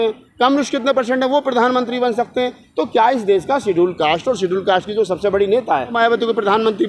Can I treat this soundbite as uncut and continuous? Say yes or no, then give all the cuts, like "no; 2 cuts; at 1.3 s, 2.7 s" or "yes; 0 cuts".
no; 1 cut; at 5.9 s